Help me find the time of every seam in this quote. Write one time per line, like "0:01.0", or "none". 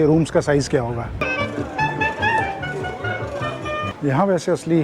0:01.2
0:03.9